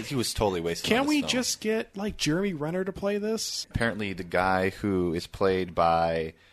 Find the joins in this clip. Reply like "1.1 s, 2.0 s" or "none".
3.7 s